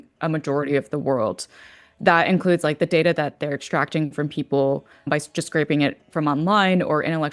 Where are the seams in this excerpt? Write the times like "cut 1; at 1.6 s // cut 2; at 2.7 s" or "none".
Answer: none